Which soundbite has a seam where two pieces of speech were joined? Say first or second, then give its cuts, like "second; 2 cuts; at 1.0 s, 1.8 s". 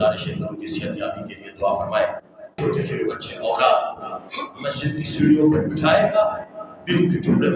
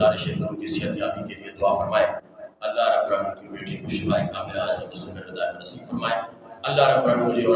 first; 1 cut; at 2.6 s